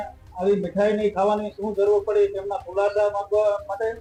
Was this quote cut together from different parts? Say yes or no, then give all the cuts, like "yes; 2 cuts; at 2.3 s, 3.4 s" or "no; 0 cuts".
no; 0 cuts